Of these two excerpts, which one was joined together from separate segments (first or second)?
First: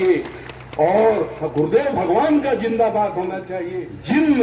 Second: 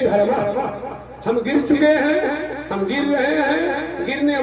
first